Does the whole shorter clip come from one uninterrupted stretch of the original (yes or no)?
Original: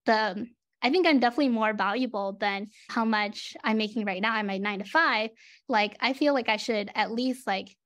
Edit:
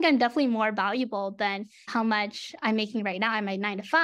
yes